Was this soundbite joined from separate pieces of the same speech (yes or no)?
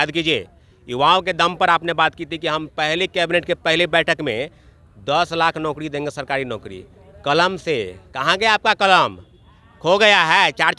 no